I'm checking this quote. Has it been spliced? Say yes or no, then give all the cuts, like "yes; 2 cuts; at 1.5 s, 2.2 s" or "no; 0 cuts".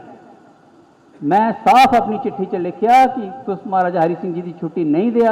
no; 0 cuts